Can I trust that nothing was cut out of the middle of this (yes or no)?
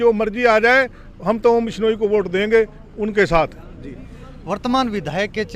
yes